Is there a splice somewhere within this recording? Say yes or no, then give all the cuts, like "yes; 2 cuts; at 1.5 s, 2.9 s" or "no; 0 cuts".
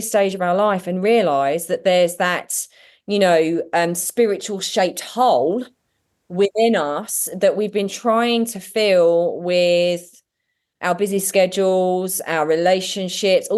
no; 0 cuts